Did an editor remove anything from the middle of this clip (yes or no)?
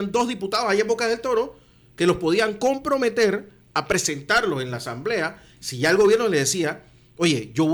no